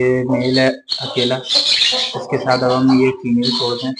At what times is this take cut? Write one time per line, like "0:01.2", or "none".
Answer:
none